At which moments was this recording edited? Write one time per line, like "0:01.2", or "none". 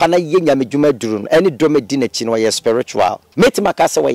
0:03.2